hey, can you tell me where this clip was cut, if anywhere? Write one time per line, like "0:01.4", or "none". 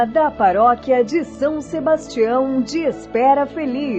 none